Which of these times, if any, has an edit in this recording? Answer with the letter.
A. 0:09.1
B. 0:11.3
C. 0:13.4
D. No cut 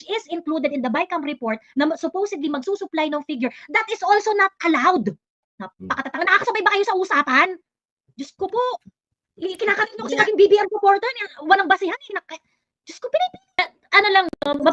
C